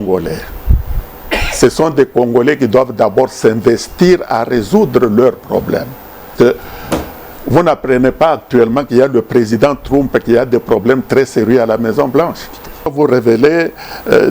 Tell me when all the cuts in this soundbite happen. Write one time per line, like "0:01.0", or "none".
0:06.3
0:12.9